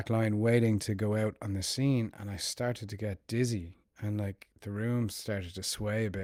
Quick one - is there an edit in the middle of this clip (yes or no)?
no